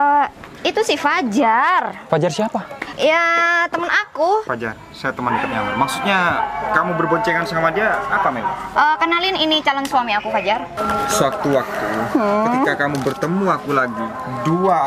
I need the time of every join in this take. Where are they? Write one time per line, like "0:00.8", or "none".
0:02.0
0:02.8
0:04.5
0:10.7